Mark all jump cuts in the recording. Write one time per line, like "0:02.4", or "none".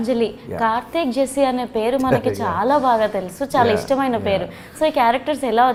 none